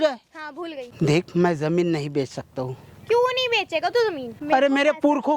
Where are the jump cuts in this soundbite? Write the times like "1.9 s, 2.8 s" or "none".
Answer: 0.9 s, 4.3 s